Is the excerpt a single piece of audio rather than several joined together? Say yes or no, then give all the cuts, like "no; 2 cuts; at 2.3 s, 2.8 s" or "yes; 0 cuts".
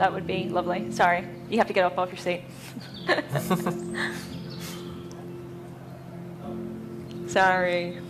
no; 1 cut; at 1.8 s